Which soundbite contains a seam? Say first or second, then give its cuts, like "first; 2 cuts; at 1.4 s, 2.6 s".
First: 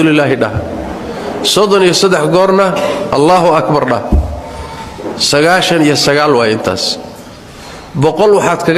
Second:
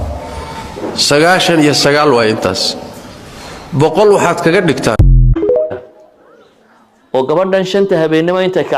second; 1 cut; at 5.7 s